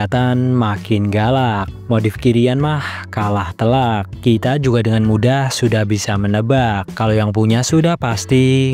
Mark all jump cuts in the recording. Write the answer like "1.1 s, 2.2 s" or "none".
none